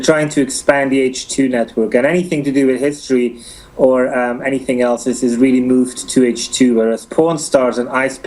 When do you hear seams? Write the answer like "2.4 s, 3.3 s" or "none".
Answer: 7.3 s